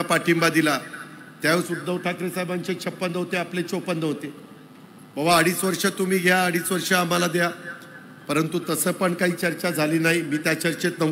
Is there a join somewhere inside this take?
no; 0 cuts

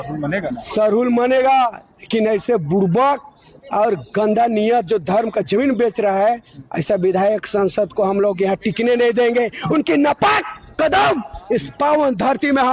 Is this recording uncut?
yes; 0 cuts

